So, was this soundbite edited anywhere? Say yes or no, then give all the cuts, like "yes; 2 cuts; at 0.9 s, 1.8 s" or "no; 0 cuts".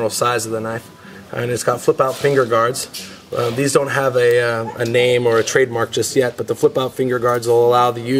no; 0 cuts